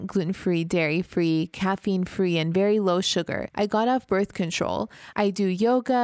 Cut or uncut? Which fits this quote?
cut